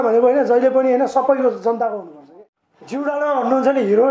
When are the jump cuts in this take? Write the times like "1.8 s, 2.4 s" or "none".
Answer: 2.2 s